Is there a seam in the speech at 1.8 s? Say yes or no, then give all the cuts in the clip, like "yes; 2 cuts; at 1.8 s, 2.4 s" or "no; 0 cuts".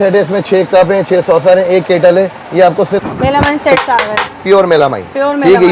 no; 1 cut; at 3.0 s